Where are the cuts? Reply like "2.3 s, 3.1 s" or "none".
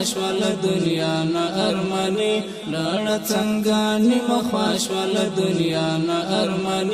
2.6 s

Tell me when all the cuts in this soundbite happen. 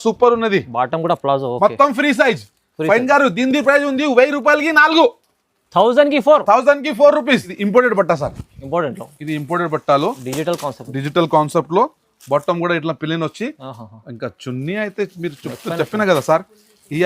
7.5 s

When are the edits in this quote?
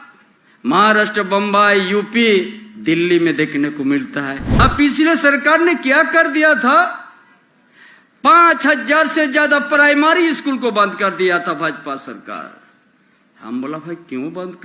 4.5 s

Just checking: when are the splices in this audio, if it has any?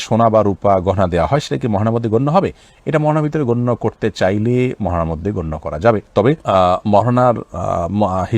none

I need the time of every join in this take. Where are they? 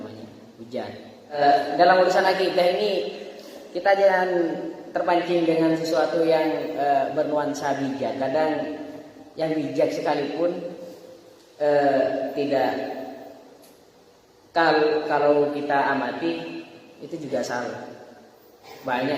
1.4 s

